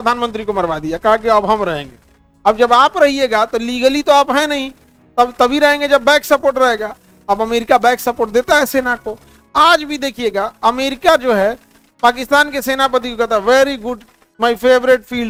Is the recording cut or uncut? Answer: uncut